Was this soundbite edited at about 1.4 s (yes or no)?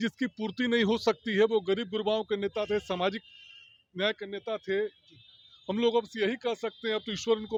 no